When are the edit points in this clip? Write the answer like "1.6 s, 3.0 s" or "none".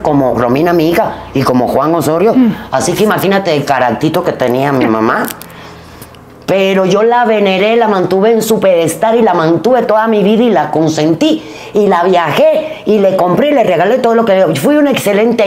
none